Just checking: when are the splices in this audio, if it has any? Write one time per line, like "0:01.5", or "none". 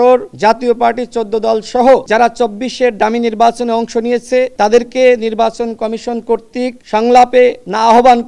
none